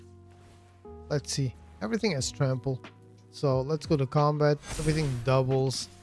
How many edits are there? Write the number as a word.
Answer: one